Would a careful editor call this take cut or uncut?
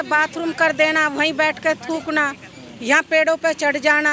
uncut